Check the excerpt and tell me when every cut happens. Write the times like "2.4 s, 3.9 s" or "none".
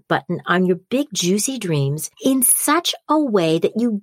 2.0 s